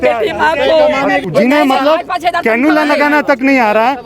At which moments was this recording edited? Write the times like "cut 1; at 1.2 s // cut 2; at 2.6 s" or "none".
cut 1; at 1.2 s